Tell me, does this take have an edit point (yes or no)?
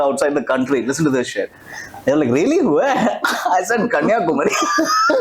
no